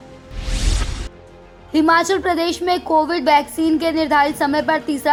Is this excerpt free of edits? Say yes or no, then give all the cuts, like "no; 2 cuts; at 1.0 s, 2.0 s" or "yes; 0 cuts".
yes; 0 cuts